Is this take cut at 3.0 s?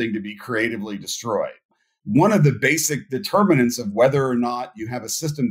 no; 1 cut; at 1.7 s

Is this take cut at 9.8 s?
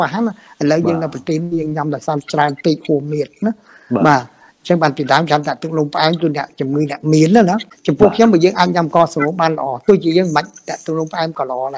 no; 1 cut; at 7.7 s

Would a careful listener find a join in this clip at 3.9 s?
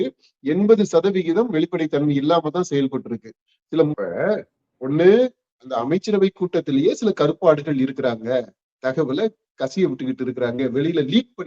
yes; 1 cut; at 3.9 s

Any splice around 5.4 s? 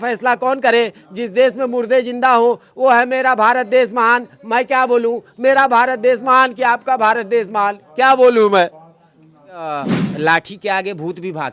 no; 1 cut; at 9.6 s

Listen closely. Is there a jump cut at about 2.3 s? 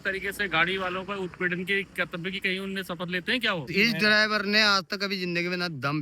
no; 1 cut; at 3.7 s

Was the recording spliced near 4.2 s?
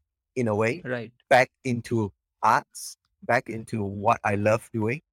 no; 0 cuts

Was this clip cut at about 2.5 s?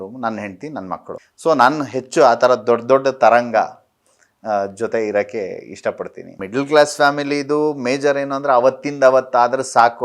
no; 2 cuts; at 1.3 s, 6.4 s

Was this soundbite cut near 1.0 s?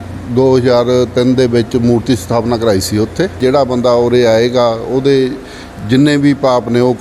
no; 1 cut; at 3.4 s

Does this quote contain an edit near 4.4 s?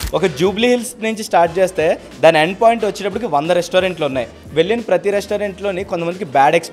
yes; 1 cut; at 4.4 s

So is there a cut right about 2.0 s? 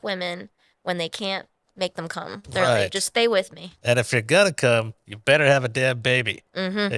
no; 0 cuts

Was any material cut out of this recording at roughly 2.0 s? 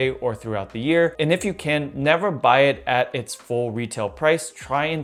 no; 0 cuts

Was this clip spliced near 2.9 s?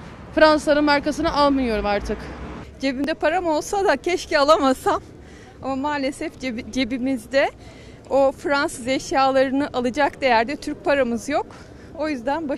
yes; 1 cut; at 2.9 s

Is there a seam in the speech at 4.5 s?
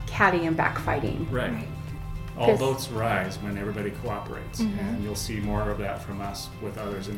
no; 1 cut; at 2.0 s

